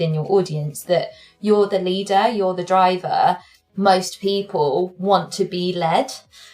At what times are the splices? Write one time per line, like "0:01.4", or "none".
0:03.5